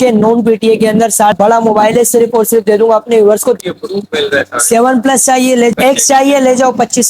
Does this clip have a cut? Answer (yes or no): yes